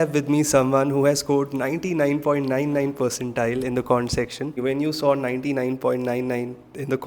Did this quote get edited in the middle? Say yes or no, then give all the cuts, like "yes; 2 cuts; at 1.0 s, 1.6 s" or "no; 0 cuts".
yes; 1 cut; at 4.6 s